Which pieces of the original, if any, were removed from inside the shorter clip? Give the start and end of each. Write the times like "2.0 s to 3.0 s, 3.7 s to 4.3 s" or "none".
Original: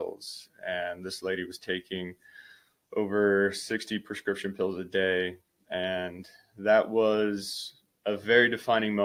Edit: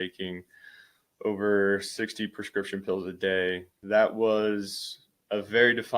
5.4 s to 6.5 s